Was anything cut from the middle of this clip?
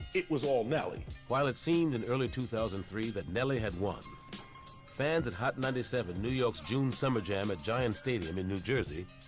yes; 1 cut; at 4.0 s

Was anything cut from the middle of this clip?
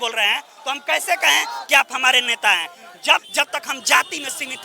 yes; 1 cut; at 3.3 s

